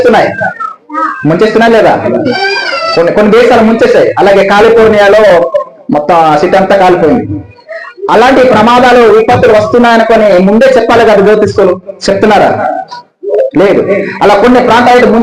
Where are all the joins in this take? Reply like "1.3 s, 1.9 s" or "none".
2.4 s